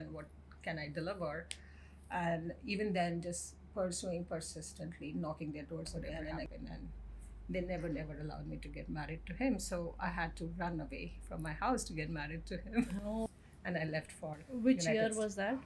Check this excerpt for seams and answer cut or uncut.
cut